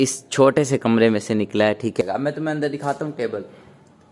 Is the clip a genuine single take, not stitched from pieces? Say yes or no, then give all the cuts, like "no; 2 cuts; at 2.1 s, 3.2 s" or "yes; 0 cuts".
no; 1 cut; at 2.0 s